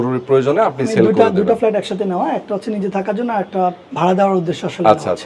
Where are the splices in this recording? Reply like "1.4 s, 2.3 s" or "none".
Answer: 3.8 s